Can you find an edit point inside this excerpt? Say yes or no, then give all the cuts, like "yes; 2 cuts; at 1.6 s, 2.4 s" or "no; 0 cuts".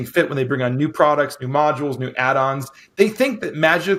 no; 0 cuts